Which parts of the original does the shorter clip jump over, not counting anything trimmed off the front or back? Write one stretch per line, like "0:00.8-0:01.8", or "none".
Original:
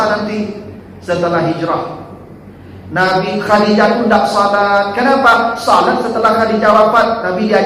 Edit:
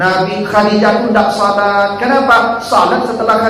none